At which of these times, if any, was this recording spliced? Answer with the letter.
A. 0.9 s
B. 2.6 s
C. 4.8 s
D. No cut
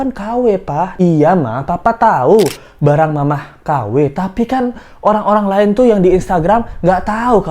A